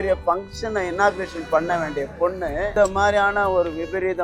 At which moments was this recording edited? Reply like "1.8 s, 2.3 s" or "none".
2.7 s